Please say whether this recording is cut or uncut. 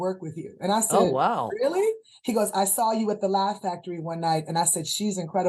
uncut